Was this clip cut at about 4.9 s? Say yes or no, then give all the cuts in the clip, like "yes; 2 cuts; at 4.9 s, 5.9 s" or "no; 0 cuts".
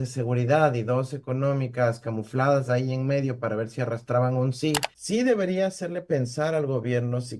yes; 1 cut; at 4.9 s